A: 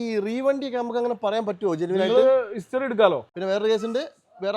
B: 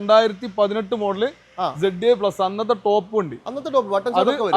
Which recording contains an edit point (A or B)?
A